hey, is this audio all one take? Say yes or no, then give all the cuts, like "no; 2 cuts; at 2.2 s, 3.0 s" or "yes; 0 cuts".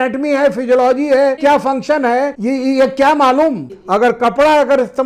no; 3 cuts; at 1.4 s, 2.4 s, 3.7 s